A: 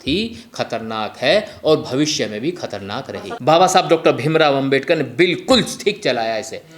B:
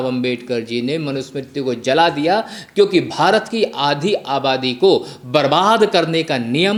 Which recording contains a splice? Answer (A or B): A